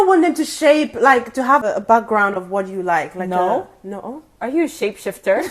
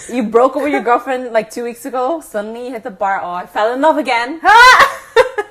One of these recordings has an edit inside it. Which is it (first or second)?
first